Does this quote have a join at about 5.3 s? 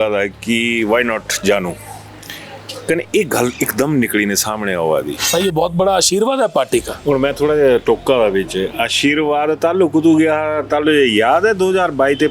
yes; 1 cut; at 5.3 s

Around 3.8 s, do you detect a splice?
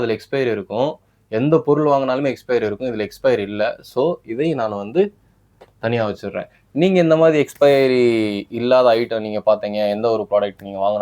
no; 0 cuts

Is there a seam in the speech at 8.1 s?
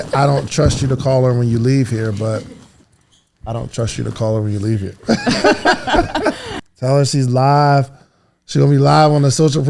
no; 1 cut; at 6.5 s

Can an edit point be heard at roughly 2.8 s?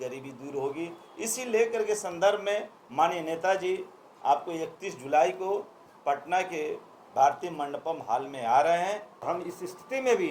no; 1 cut; at 9.1 s

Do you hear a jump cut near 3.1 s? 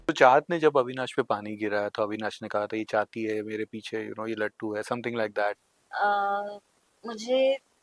no; 1 cut; at 5.7 s

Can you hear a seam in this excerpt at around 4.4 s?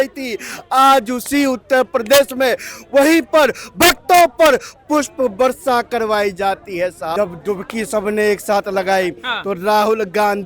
no; 1 cut; at 7.1 s

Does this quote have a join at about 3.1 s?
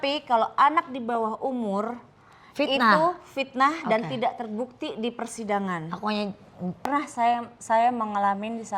no; 1 cut; at 6.9 s

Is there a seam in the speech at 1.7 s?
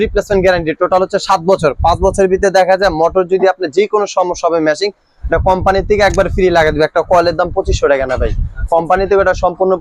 no; 0 cuts

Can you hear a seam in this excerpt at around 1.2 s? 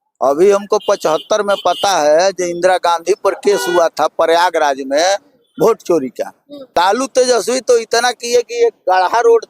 no; 1 cut; at 6.8 s

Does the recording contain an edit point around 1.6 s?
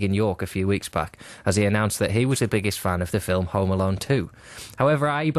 no; 1 cut; at 3.2 s

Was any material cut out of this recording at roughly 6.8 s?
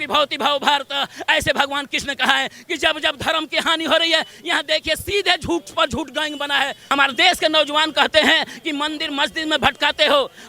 yes; 1 cut; at 6.8 s

